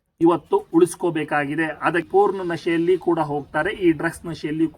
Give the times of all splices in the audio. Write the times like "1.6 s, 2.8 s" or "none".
2.1 s